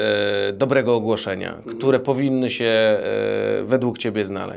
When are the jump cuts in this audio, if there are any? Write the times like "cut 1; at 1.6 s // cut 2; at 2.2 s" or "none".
none